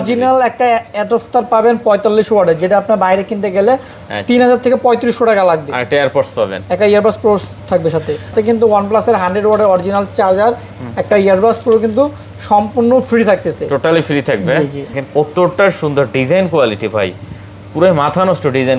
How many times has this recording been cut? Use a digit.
2